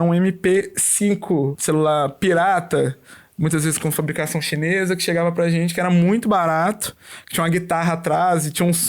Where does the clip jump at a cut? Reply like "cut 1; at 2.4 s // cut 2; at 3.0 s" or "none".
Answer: cut 1; at 1.6 s